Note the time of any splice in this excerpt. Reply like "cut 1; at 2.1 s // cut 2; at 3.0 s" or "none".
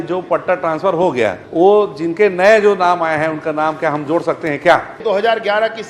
cut 1; at 1.4 s // cut 2; at 5.0 s